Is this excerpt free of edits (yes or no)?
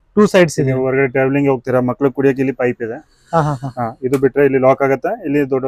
yes